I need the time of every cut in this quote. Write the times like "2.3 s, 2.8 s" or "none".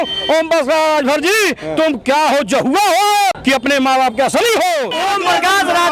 3.4 s, 4.9 s